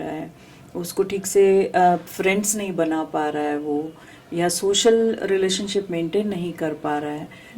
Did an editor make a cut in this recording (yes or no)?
no